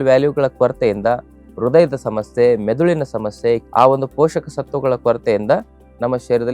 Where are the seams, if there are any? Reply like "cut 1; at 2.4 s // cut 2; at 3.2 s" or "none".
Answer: cut 1; at 3.6 s